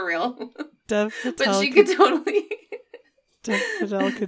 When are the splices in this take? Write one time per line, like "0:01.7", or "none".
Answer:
none